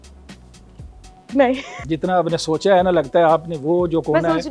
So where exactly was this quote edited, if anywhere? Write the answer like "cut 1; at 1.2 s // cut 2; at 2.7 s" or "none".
none